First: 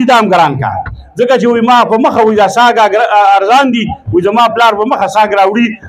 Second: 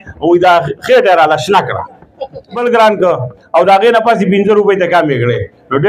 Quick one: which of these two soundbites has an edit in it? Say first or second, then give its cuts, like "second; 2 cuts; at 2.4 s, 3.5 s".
second; 1 cut; at 2.6 s